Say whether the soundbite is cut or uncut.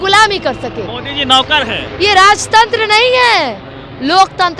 uncut